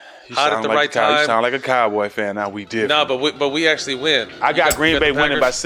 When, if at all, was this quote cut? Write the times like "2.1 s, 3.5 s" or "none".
4.4 s